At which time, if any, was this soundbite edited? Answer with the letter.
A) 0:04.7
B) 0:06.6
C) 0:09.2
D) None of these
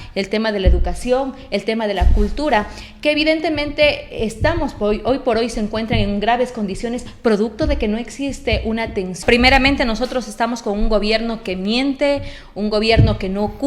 C